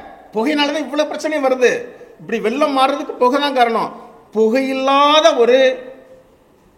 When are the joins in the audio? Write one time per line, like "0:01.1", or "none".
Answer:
none